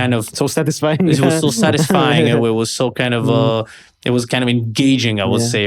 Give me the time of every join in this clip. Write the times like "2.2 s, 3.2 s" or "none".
none